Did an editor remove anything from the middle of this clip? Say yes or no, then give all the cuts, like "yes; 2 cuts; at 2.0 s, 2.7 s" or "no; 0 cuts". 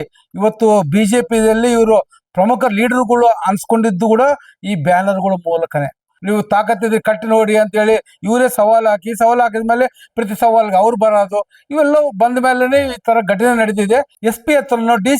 yes; 2 cuts; at 6.1 s, 14.1 s